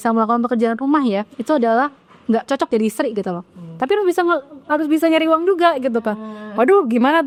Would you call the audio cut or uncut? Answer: uncut